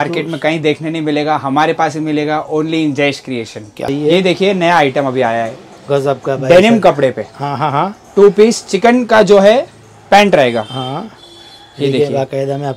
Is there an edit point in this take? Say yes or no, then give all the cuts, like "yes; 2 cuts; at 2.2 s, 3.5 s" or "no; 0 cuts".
yes; 1 cut; at 3.9 s